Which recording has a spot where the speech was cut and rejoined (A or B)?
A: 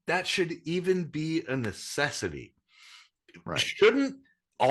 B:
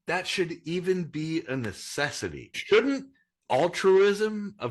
B